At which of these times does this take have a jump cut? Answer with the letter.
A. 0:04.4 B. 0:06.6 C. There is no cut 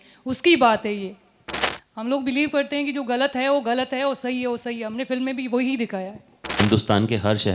B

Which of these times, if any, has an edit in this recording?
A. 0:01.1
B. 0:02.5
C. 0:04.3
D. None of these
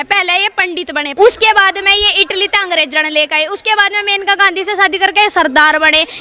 A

